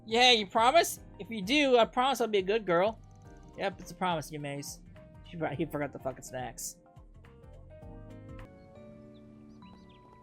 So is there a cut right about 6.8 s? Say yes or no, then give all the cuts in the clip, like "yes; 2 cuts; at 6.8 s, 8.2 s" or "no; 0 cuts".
no; 1 cut; at 8.4 s